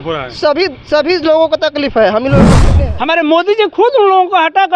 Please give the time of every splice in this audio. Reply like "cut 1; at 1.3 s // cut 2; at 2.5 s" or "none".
cut 1; at 2.6 s